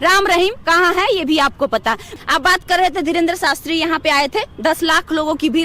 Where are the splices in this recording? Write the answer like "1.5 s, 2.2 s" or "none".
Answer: 2.1 s